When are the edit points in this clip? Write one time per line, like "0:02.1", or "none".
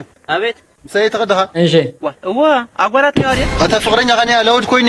none